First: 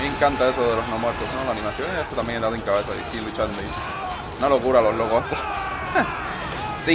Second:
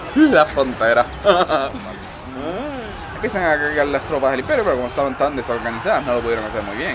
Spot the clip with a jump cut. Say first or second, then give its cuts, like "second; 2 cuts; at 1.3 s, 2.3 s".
second; 1 cut; at 2.9 s